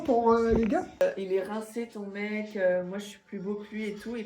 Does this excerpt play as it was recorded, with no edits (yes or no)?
no